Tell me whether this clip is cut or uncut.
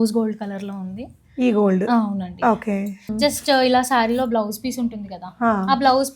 cut